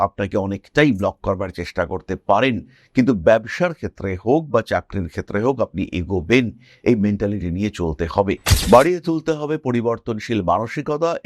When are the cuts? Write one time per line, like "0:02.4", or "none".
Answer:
0:08.5